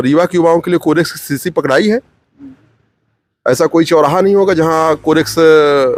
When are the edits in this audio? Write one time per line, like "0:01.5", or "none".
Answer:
none